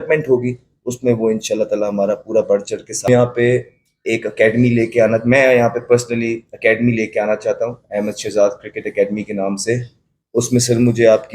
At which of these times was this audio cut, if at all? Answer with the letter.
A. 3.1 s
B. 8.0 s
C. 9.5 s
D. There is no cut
A